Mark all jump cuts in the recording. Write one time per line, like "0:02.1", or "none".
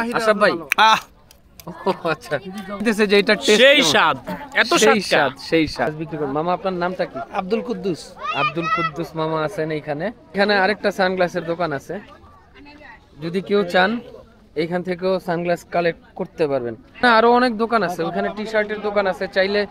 0:02.8
0:05.9
0:10.3
0:17.0